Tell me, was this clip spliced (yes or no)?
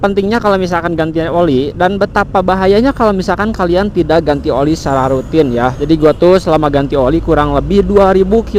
yes